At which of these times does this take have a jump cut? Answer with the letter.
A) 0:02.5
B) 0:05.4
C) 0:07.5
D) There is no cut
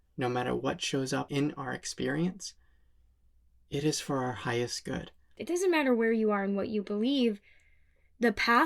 B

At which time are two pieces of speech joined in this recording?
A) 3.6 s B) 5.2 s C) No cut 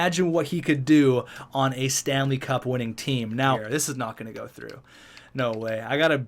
A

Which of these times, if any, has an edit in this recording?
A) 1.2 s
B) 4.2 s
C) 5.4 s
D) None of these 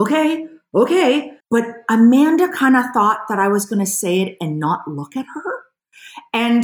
A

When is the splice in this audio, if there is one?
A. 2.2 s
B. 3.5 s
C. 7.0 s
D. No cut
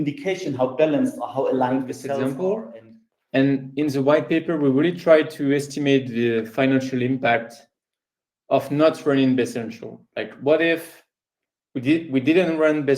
A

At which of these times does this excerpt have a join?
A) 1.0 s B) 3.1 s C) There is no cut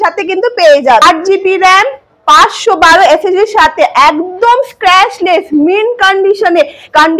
A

